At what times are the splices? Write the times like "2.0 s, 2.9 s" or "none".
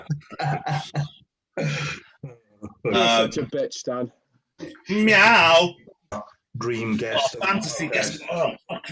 6.1 s